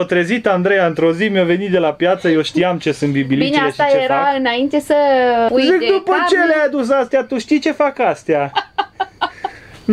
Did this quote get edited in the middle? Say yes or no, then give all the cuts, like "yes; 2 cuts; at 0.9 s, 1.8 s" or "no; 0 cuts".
yes; 1 cut; at 5.5 s